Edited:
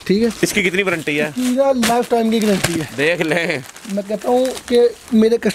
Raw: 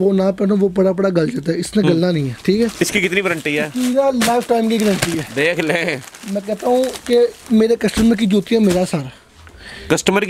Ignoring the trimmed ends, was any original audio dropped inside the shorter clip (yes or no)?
no